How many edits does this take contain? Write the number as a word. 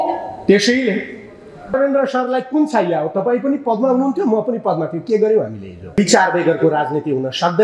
two